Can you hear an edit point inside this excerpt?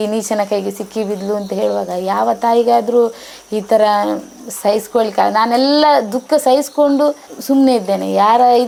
no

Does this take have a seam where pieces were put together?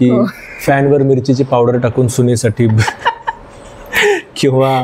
no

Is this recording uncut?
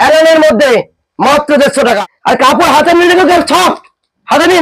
no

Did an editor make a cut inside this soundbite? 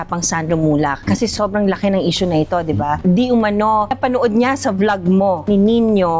no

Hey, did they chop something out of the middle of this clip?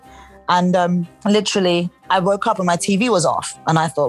yes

